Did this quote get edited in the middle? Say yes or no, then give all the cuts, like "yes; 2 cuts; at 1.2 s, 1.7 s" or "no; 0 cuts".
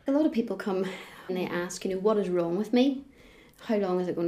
yes; 1 cut; at 1.2 s